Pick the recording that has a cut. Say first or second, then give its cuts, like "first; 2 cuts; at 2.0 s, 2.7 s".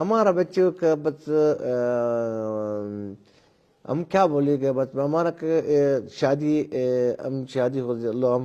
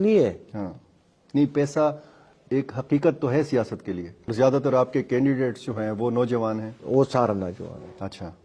second; 1 cut; at 4.3 s